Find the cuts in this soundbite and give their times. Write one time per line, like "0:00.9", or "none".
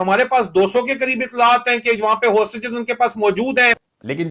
none